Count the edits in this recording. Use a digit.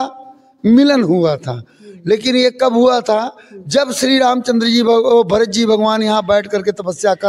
0